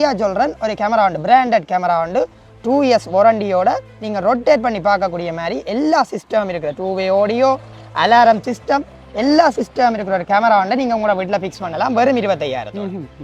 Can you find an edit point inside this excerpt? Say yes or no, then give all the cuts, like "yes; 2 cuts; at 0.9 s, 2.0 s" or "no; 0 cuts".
no; 0 cuts